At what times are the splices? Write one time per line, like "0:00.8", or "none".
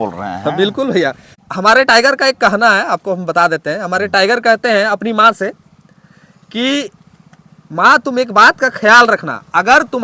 0:01.3